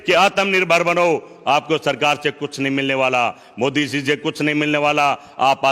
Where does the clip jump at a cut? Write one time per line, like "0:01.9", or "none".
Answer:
none